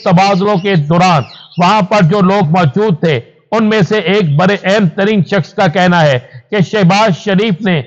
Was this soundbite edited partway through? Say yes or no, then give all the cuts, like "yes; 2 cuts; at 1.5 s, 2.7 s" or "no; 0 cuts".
no; 0 cuts